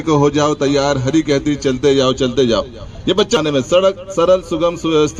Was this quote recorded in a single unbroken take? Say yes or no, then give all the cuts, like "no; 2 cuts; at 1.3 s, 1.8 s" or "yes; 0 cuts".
no; 1 cut; at 3.4 s